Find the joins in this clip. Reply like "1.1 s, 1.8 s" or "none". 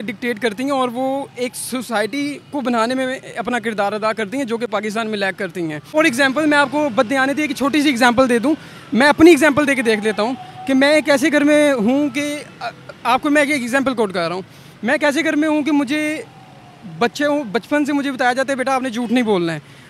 5.8 s